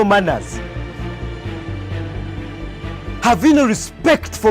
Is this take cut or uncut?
cut